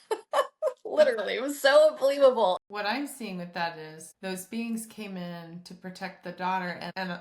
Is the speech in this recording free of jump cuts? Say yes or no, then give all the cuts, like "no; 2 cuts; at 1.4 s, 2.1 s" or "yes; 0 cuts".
no; 1 cut; at 2.6 s